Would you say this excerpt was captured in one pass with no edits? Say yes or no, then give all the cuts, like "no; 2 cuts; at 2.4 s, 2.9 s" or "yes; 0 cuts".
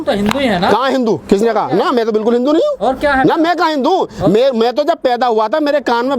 yes; 0 cuts